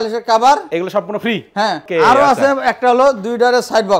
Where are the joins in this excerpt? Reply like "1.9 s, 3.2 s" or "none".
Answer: 1.9 s